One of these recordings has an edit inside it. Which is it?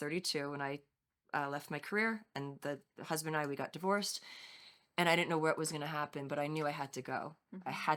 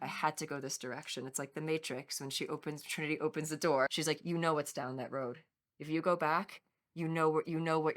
second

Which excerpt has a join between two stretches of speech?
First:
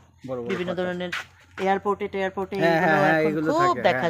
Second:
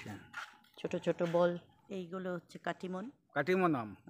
second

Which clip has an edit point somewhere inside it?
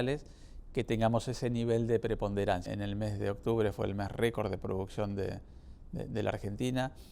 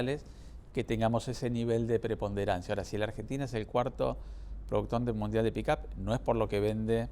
first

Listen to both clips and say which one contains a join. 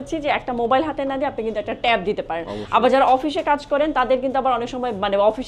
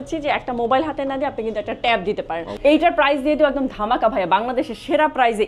second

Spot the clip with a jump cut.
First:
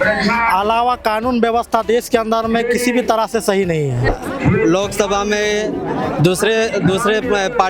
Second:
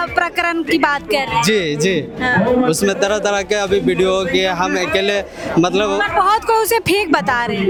first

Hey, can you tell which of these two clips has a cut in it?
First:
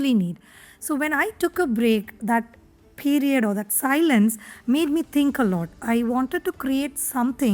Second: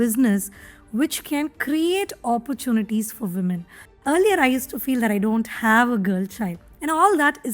second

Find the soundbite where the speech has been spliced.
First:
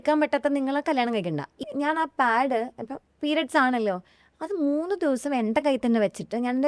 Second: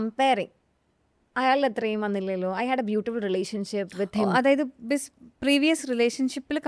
first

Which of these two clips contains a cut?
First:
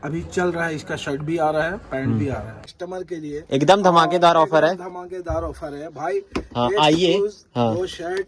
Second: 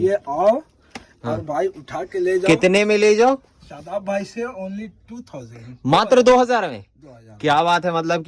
first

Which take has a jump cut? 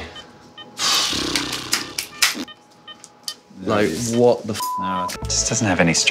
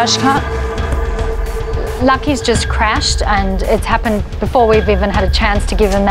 first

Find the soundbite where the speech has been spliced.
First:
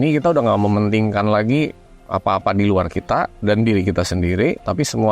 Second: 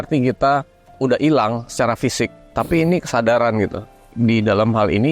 second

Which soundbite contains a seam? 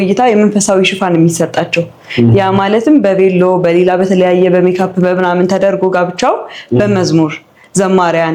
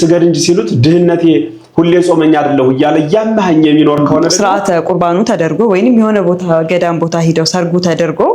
second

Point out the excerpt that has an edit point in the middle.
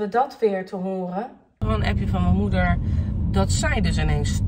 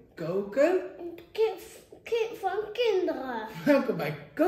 first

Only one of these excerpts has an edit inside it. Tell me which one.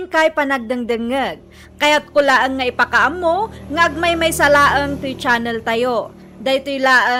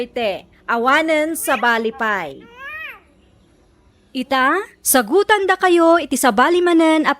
second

